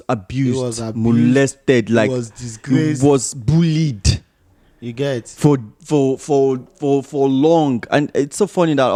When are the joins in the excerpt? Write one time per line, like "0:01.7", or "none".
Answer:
none